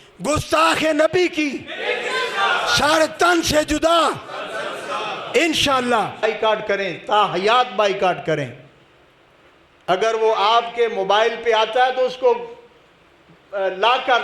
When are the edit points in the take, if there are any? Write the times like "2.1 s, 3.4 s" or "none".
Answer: 6.2 s